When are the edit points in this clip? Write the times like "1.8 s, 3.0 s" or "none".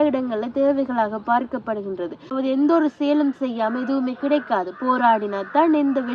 2.3 s